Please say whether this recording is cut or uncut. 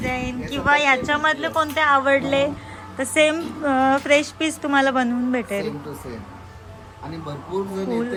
uncut